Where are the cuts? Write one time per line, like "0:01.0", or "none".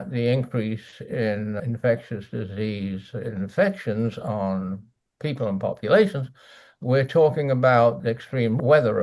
0:08.0